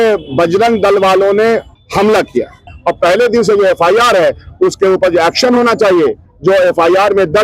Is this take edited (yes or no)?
yes